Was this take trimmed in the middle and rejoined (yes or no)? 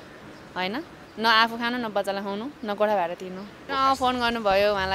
yes